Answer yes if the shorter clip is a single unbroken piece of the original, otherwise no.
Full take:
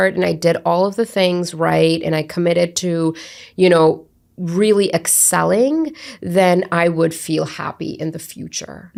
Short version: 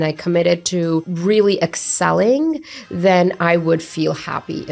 no